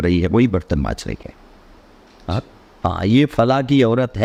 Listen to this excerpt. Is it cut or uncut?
uncut